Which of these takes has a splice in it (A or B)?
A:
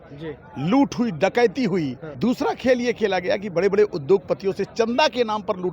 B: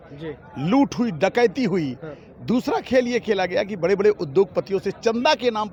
A